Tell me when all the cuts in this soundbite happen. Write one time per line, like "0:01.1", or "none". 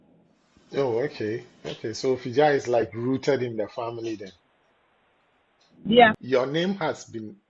0:06.1